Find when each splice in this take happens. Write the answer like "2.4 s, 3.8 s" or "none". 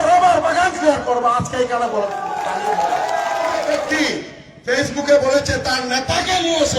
3.8 s